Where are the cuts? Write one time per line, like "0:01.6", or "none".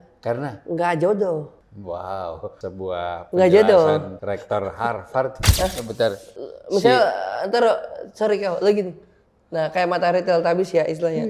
0:01.6
0:02.6
0:04.1
0:05.4